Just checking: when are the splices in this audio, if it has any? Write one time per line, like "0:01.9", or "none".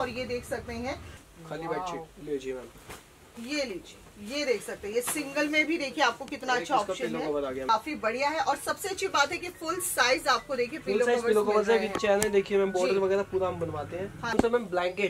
0:01.1
0:07.6
0:14.3